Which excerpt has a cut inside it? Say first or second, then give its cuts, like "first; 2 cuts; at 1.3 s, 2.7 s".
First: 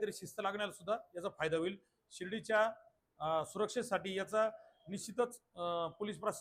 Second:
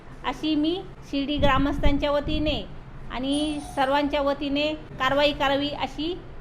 second; 2 cuts; at 1.0 s, 4.9 s